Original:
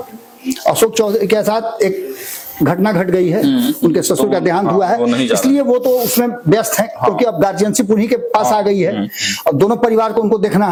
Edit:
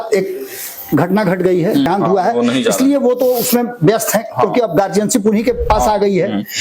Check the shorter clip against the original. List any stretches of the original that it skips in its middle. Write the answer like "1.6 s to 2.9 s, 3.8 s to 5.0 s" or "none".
3.5 s to 4.5 s